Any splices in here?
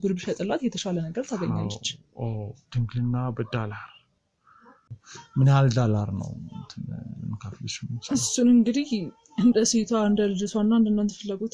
yes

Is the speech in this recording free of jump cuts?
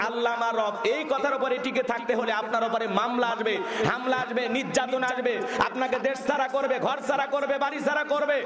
yes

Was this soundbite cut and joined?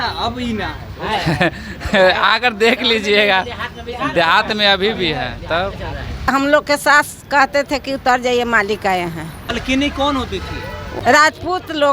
yes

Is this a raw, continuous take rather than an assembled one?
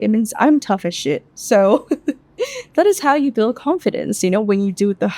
yes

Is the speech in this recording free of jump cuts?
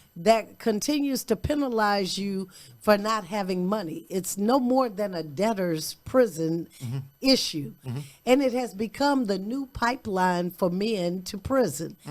yes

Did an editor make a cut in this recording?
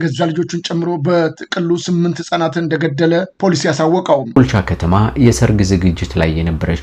yes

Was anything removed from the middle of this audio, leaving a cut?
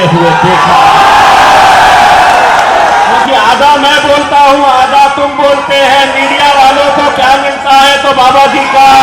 yes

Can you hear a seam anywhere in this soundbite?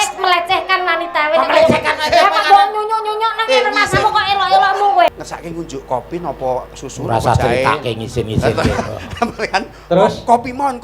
yes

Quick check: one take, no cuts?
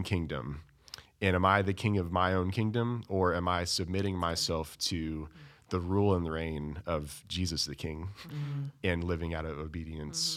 yes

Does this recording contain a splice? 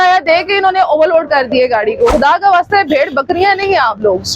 yes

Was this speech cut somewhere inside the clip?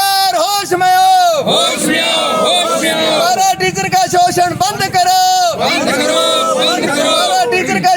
no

